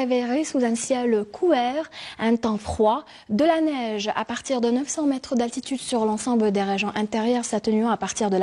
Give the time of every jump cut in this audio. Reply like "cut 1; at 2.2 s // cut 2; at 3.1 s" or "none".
cut 1; at 2.8 s